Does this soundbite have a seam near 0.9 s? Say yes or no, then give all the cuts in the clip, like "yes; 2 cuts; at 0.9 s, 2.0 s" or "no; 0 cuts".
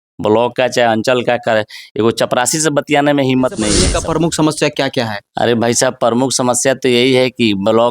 no; 1 cut; at 3.9 s